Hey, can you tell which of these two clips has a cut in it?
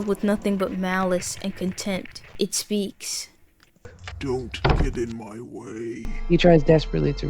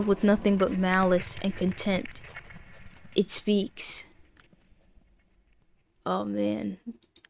first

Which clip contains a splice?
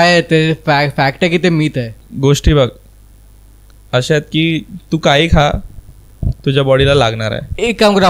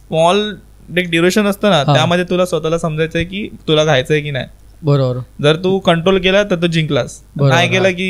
first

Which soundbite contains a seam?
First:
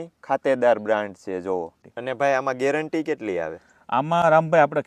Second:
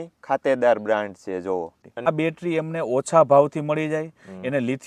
second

